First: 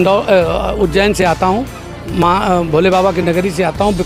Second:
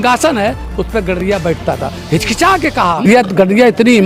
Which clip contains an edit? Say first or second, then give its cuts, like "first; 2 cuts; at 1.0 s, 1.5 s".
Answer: second; 1 cut; at 3.0 s